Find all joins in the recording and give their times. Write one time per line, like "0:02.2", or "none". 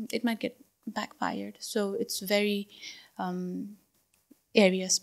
none

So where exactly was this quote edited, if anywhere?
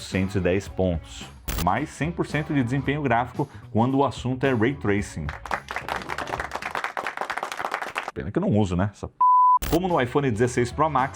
0:01.4
0:09.6

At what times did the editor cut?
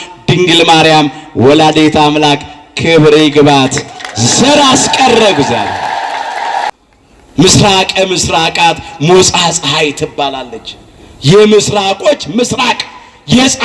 0:06.7

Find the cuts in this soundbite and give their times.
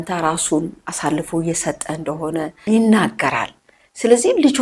0:02.6

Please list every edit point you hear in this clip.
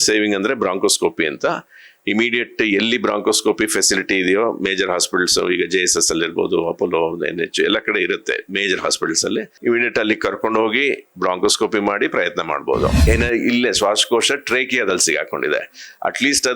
0:13.0

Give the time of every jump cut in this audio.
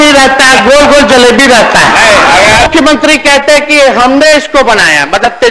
0:02.7

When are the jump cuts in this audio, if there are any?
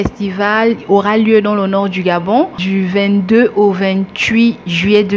none

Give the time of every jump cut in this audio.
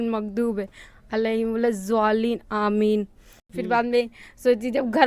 0:03.5

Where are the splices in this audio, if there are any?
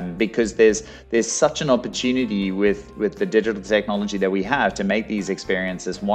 none

